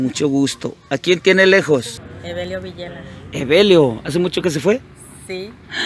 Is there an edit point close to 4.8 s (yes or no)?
no